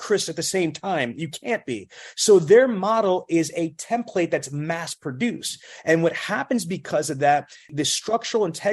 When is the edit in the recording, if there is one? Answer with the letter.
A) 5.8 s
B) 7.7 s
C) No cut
B